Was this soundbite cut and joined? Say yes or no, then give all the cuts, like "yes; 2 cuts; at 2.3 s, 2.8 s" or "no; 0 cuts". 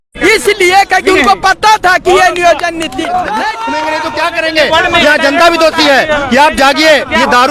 yes; 1 cut; at 3.9 s